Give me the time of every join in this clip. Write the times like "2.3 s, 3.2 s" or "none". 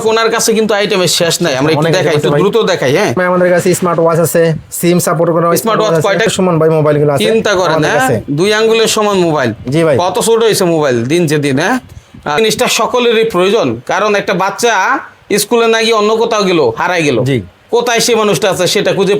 6.3 s, 12.4 s, 17.6 s